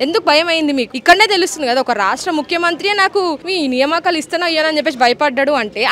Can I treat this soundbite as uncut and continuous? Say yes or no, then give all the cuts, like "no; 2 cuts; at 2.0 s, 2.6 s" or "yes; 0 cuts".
no; 1 cut; at 0.9 s